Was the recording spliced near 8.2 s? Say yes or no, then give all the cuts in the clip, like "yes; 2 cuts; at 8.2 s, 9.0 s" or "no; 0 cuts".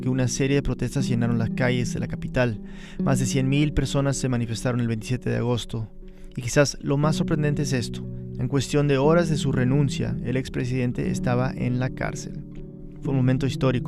yes; 1 cut; at 8.2 s